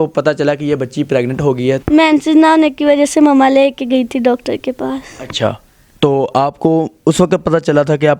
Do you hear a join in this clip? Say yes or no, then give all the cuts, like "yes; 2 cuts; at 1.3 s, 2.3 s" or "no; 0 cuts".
yes; 1 cut; at 1.8 s